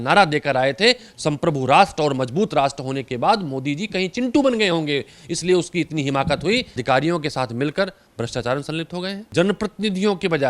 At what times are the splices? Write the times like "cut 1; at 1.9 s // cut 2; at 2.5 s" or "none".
cut 1; at 6.8 s // cut 2; at 9.2 s